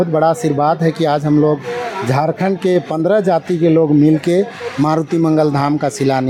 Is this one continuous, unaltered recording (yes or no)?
yes